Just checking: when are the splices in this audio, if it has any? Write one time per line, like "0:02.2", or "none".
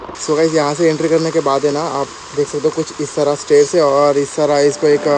none